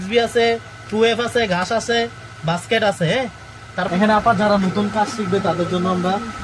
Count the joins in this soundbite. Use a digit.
1